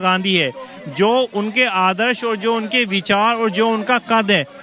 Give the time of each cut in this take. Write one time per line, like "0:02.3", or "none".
none